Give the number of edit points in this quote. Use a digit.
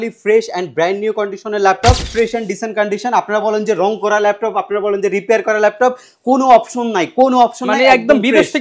1